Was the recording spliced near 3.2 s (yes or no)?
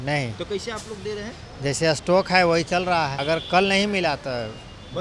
yes